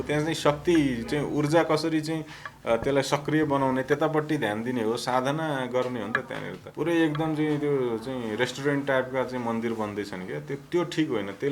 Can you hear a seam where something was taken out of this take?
yes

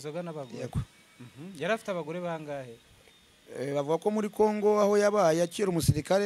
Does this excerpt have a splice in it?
no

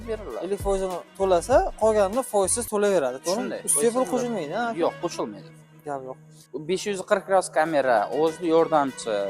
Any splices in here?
yes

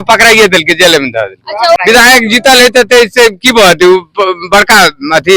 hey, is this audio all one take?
no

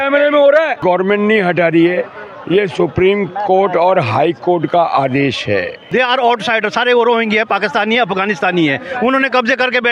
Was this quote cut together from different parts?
yes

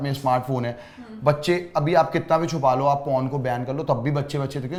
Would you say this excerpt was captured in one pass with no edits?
yes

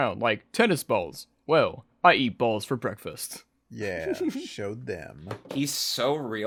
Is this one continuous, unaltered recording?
yes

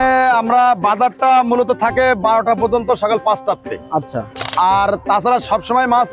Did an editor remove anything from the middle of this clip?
no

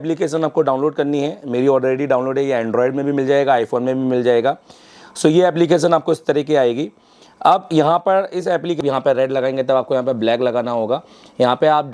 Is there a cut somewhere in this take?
yes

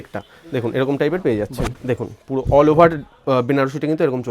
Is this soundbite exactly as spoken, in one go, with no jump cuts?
no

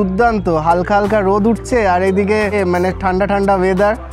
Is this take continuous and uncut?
no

